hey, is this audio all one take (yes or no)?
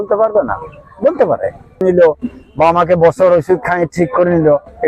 no